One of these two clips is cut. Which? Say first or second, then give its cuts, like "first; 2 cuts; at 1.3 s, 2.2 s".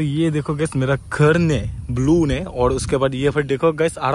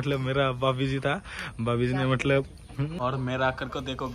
second; 1 cut; at 2.9 s